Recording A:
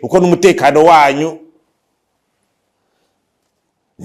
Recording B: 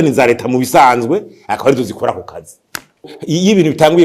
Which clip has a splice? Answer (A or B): B